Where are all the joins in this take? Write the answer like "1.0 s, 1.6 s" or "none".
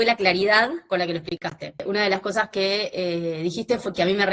1.8 s